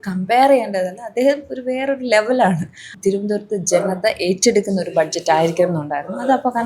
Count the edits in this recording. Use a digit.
1